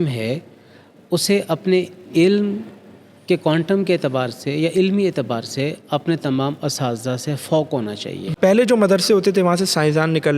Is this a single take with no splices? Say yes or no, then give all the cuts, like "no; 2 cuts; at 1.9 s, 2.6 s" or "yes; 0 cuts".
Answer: no; 1 cut; at 8.3 s